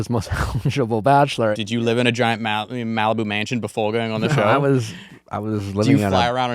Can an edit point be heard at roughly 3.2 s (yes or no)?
no